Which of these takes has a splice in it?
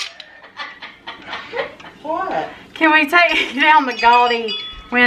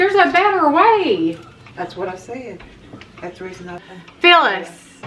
second; 2 cuts; at 1.6 s, 3.8 s

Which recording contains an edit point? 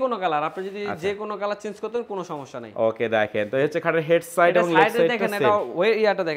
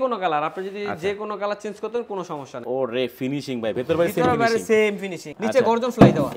second; 2 cuts; at 2.6 s, 5.3 s

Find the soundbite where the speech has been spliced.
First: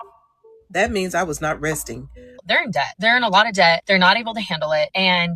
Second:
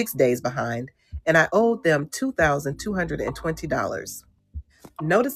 first; 1 cut; at 2.4 s

